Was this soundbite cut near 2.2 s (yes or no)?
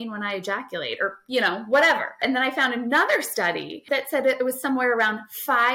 yes